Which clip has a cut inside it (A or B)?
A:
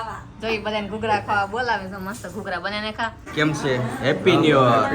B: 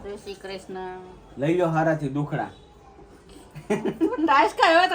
A